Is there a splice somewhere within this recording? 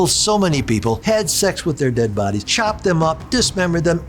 yes; 2 cuts; at 1.0 s, 2.5 s

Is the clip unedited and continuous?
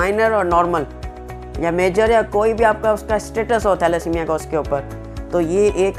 yes; 0 cuts

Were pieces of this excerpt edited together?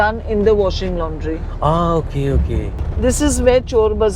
yes; 1 cut; at 2.8 s

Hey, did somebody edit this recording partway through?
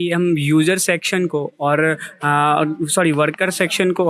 no; 0 cuts

